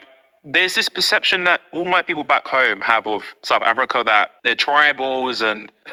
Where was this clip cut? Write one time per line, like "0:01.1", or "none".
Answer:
none